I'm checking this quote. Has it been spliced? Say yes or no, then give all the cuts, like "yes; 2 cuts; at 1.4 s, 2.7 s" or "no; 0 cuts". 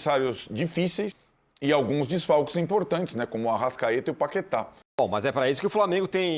yes; 2 cuts; at 1.2 s, 5.0 s